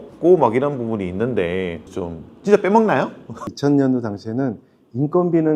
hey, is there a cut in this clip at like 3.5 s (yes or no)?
yes